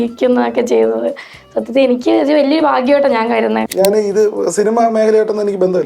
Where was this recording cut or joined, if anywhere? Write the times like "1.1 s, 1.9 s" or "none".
3.7 s

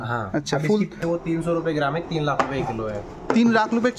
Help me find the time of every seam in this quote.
1.0 s

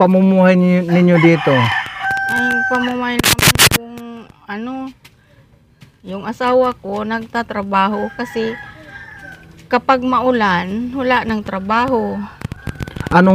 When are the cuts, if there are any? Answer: none

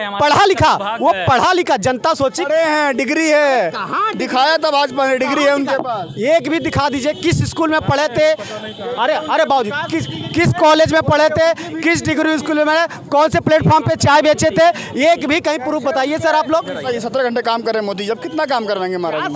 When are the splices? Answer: 16.8 s

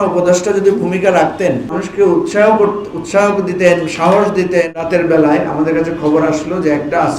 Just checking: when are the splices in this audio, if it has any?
1.8 s, 4.8 s

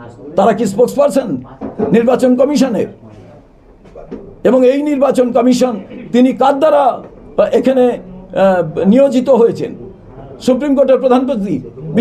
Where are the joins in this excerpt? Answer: none

